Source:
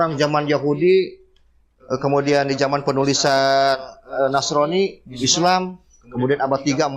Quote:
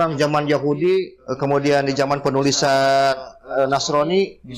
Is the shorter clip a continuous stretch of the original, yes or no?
no